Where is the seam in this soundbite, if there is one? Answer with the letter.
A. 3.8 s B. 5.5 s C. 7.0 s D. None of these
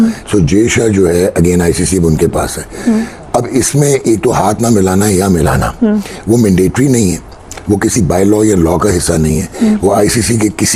D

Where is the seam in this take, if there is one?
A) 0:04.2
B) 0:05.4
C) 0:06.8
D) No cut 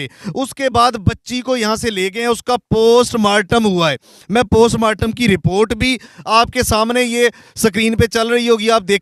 D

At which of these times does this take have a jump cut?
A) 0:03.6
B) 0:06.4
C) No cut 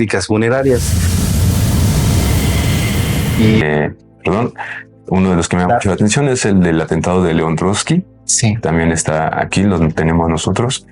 A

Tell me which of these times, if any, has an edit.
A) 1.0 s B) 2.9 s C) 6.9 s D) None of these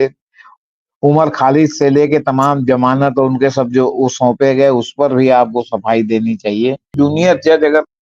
C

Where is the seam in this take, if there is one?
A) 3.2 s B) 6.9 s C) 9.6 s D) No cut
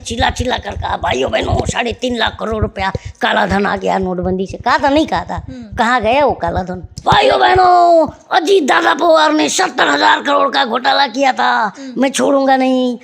B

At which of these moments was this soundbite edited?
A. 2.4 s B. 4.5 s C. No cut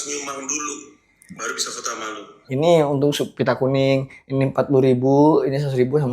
A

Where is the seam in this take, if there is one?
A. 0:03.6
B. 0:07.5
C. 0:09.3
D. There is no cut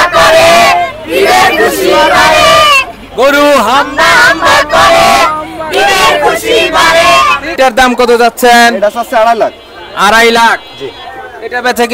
B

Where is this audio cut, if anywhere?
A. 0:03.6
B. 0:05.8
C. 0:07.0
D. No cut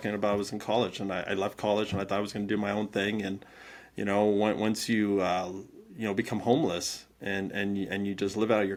D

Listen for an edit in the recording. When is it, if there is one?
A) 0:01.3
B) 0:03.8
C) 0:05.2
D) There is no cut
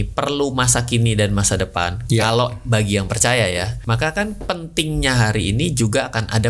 B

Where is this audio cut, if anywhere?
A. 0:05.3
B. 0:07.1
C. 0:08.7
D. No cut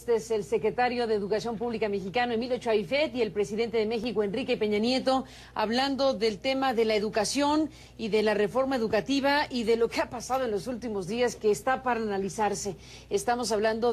B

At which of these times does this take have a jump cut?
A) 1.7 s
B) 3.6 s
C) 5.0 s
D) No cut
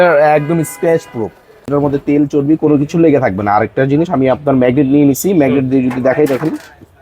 A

